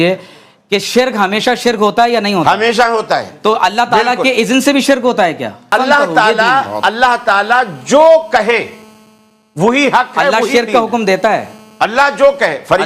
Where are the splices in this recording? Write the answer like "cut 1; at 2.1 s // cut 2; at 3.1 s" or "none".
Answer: cut 1; at 5.7 s